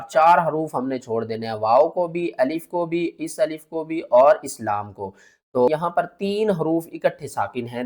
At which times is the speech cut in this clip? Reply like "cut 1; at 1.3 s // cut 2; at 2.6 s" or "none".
cut 1; at 5.7 s